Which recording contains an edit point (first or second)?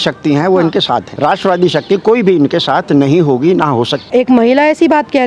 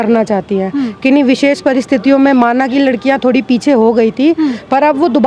first